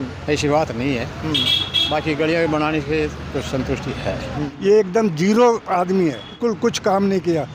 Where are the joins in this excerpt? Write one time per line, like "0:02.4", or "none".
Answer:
0:04.5
0:06.4